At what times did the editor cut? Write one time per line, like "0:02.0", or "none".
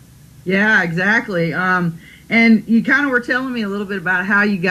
none